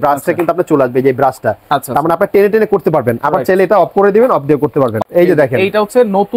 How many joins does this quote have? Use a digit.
1